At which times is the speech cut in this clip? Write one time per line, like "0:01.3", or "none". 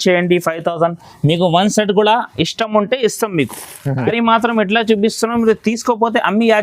0:04.1